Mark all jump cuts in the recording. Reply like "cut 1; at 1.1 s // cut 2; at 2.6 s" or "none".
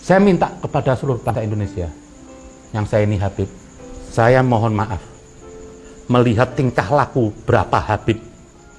cut 1; at 1.3 s